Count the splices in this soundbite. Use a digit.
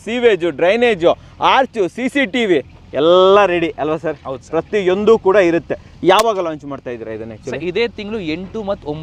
0